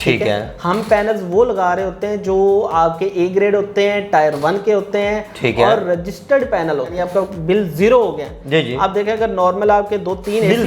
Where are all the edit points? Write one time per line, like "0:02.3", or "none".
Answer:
0:07.0